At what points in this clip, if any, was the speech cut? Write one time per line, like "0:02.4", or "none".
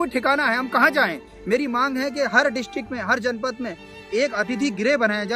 0:01.3
0:03.9